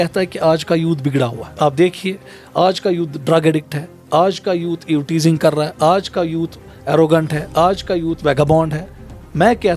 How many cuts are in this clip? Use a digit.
1